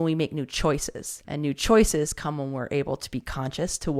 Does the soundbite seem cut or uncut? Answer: cut